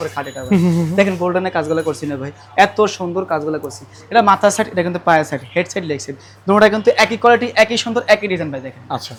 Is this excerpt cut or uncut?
uncut